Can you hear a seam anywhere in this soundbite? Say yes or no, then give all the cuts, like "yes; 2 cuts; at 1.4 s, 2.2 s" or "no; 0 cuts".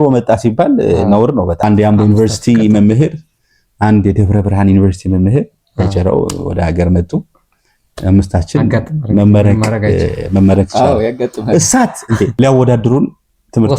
yes; 2 cuts; at 1.6 s, 12.3 s